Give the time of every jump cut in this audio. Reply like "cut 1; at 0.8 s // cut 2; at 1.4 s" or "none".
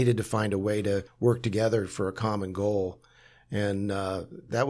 cut 1; at 1.1 s